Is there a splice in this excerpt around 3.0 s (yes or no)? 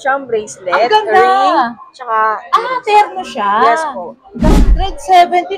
no